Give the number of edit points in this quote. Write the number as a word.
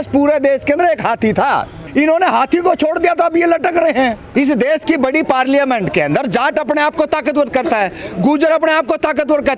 two